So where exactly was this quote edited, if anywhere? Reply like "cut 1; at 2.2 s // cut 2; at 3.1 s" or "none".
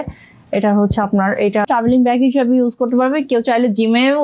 cut 1; at 1.6 s